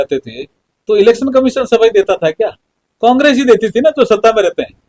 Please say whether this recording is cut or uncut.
uncut